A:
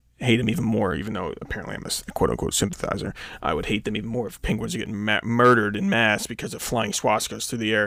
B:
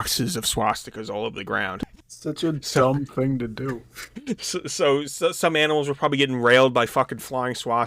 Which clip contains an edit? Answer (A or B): B